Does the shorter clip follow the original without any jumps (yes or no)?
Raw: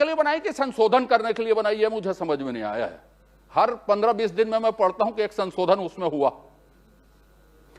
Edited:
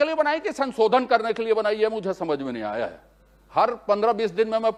yes